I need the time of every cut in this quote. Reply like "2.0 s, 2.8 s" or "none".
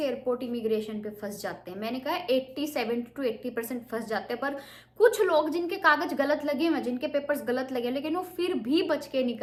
none